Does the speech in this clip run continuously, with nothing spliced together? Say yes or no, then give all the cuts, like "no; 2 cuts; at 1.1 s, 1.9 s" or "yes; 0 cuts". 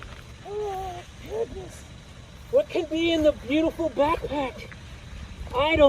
yes; 0 cuts